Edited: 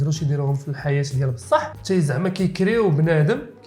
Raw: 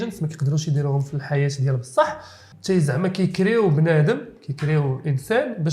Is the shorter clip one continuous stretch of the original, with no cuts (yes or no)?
no